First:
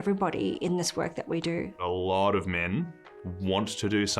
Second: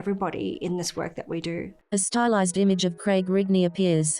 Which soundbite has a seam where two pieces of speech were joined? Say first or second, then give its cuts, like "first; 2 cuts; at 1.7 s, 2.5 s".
first; 1 cut; at 1.7 s